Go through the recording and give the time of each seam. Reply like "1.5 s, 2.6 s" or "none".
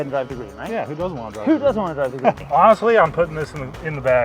2.4 s